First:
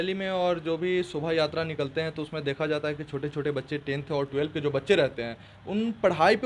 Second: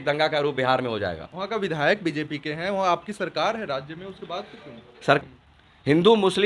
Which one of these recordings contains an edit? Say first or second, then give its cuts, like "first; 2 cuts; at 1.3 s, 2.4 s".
second; 1 cut; at 5.2 s